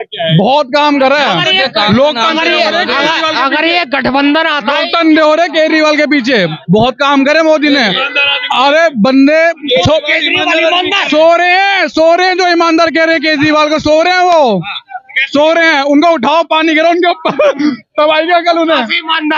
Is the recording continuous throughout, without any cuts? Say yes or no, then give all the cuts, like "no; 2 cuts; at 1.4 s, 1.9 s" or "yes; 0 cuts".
yes; 0 cuts